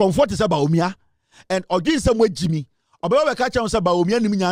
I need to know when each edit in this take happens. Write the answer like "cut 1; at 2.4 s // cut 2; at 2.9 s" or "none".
none